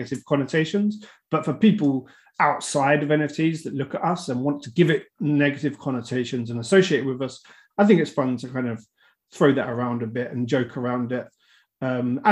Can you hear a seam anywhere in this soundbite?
no; 0 cuts

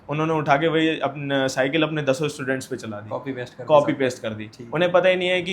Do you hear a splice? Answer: no; 0 cuts

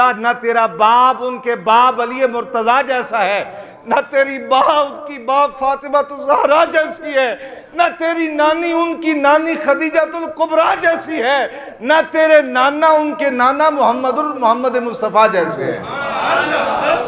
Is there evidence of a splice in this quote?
no; 0 cuts

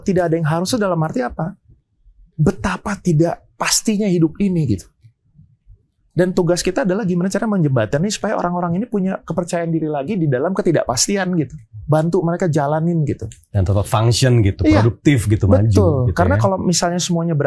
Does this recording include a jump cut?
no; 0 cuts

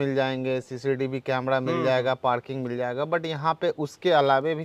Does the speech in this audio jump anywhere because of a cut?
no; 0 cuts

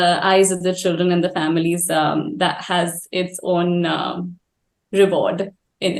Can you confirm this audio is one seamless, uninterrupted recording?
yes; 0 cuts

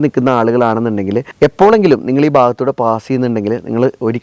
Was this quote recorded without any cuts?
yes; 0 cuts

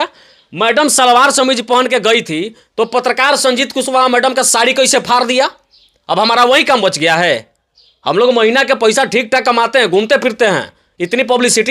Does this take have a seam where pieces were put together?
no; 0 cuts

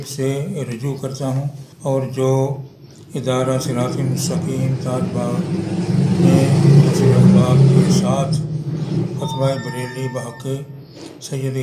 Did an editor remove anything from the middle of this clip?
yes; 1 cut; at 1.6 s

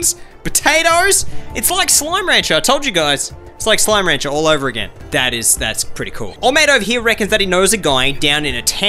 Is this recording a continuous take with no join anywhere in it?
yes; 0 cuts

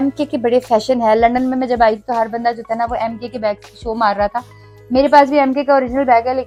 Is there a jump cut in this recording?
no; 0 cuts

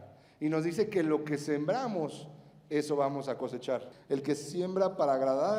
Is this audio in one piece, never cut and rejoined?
no; 1 cut; at 3.9 s

